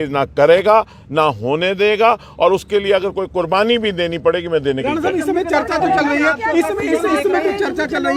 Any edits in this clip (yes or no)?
no